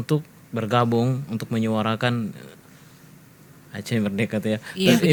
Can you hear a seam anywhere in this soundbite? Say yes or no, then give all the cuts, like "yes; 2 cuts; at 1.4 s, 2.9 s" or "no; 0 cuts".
no; 0 cuts